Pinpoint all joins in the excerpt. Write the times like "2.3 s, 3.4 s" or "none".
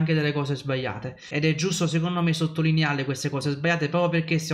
1.3 s